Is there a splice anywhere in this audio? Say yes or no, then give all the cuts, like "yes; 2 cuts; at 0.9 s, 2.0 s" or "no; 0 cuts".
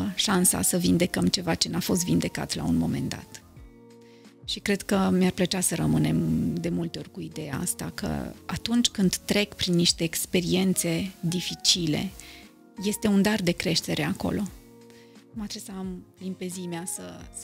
no; 0 cuts